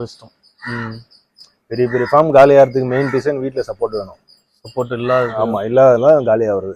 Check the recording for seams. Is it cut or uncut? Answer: uncut